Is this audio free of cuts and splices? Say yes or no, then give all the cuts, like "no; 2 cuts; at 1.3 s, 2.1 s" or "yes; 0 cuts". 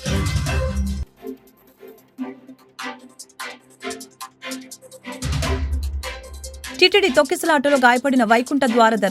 no; 1 cut; at 0.9 s